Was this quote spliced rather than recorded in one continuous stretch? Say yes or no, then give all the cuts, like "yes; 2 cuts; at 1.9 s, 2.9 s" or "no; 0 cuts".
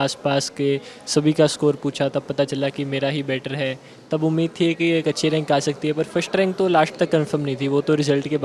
no; 0 cuts